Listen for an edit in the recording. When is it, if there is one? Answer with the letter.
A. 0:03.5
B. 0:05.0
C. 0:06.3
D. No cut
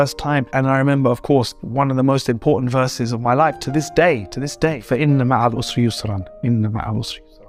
D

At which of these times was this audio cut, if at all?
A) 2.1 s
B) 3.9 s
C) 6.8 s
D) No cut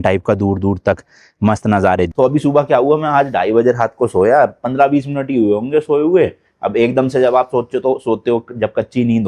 A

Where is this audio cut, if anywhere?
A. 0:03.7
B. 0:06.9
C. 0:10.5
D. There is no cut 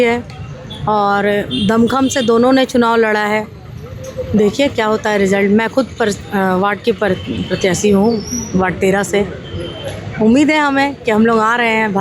D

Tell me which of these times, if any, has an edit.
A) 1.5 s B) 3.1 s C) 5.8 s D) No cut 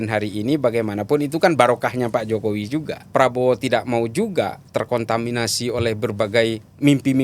B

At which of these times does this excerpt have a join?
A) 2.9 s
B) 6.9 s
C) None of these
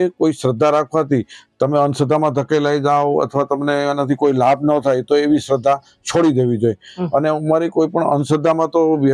C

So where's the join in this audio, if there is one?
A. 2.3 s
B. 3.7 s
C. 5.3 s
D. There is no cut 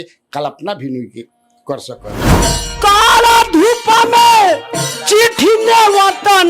A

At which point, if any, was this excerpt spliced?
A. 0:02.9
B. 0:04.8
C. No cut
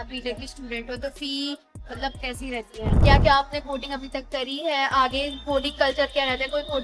A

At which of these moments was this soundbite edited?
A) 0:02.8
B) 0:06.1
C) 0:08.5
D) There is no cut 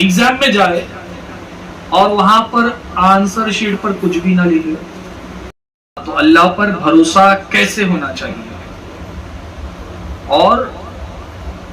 B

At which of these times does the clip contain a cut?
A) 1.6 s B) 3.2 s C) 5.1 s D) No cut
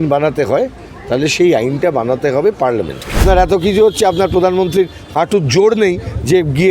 B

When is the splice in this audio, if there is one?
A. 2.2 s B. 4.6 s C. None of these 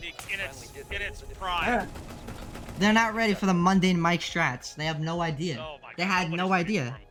C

